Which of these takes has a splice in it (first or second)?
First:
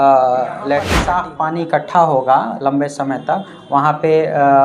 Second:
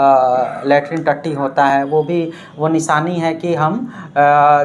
first